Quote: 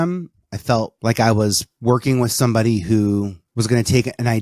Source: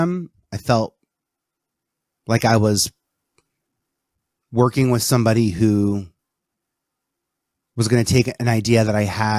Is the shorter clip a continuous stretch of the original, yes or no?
no